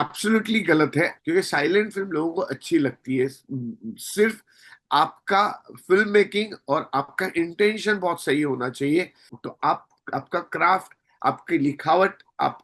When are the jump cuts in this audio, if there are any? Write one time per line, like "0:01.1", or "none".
0:01.2
0:09.2